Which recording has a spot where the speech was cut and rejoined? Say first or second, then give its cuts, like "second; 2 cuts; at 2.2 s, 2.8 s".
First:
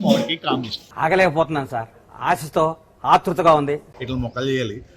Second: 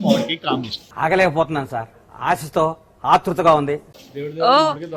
first; 1 cut; at 3.9 s